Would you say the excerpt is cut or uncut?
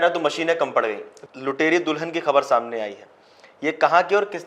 cut